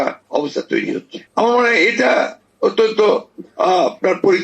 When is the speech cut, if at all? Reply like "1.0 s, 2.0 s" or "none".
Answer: 1.2 s